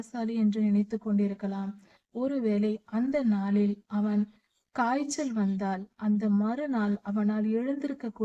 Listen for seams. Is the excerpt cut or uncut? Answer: uncut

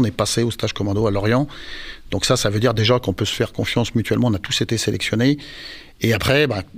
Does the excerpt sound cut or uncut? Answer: uncut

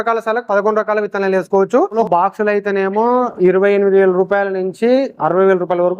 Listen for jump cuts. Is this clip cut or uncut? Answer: cut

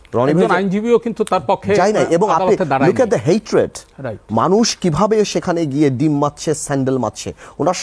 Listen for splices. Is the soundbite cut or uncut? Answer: uncut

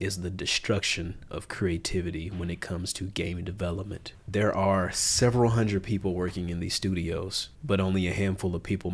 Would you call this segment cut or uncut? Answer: cut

